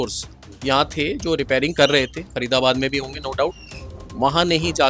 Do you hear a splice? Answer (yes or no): no